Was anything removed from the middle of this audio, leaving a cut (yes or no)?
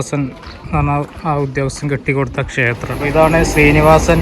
yes